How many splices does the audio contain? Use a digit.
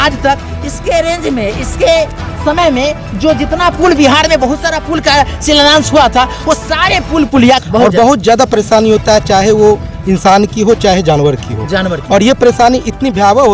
1